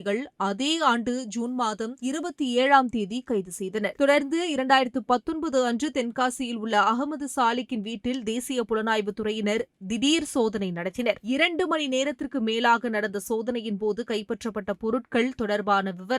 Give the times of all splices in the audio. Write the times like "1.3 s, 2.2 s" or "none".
none